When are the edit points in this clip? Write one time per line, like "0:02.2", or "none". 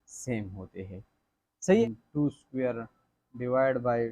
0:01.8